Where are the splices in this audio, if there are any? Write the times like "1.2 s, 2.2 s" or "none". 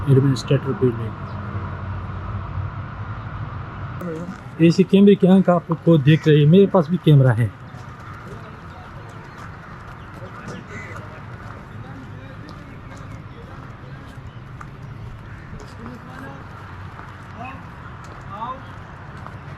4.0 s